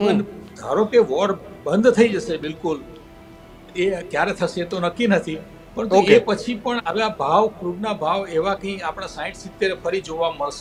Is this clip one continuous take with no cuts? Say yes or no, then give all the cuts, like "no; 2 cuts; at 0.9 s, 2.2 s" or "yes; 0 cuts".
yes; 0 cuts